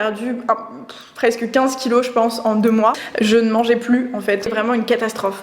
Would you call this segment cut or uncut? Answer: cut